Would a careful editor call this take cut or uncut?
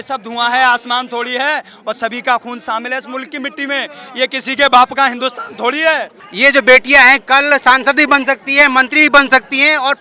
cut